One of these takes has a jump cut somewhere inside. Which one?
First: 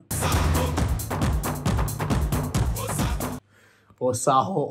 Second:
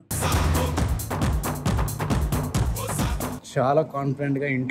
second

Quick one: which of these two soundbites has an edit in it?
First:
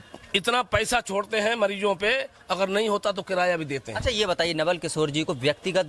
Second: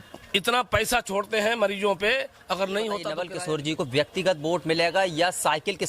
second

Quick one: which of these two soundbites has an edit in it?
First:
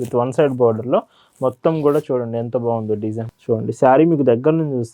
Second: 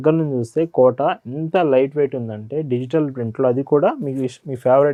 first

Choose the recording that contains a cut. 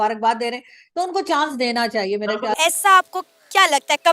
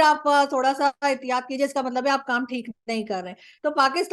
first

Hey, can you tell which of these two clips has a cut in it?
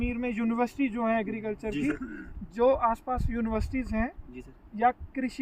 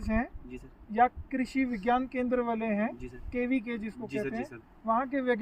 first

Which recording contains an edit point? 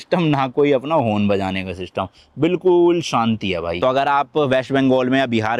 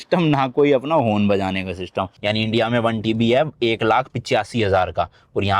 second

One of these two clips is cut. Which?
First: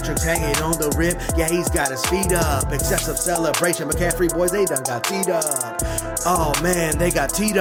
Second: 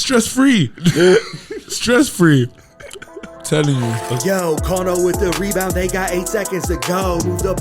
second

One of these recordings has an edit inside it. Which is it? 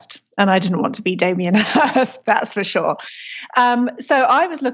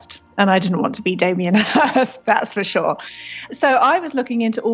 second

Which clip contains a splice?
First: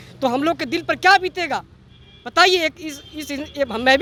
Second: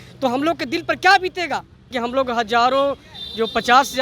second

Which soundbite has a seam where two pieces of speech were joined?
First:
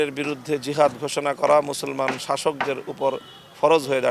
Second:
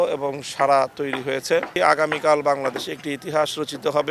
second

